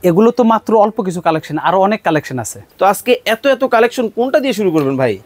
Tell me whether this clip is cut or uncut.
cut